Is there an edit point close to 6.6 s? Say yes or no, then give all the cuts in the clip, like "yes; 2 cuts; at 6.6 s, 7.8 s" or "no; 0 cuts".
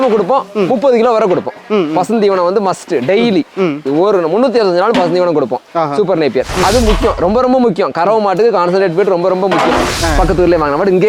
yes; 2 cuts; at 6.6 s, 9.9 s